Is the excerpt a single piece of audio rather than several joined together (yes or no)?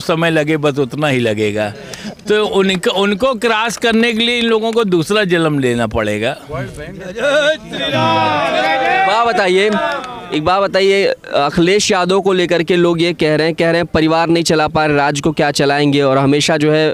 yes